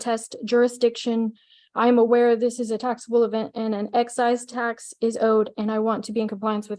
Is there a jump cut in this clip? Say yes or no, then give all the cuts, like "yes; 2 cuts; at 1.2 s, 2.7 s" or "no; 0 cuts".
no; 0 cuts